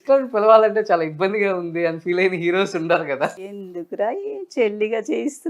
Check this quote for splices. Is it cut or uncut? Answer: cut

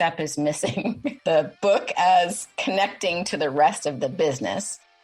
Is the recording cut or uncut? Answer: cut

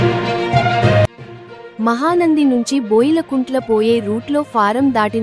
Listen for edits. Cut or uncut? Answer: uncut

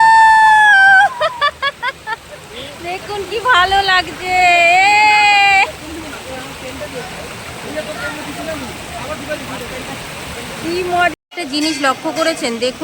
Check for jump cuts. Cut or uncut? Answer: cut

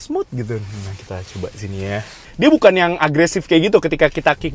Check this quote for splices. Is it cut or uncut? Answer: cut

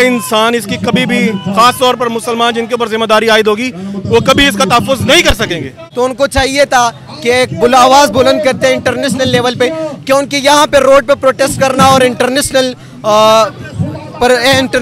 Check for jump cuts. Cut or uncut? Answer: cut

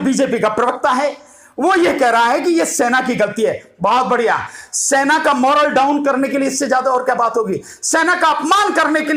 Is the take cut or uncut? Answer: uncut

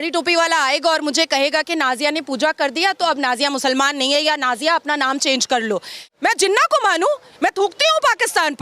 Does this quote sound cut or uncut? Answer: cut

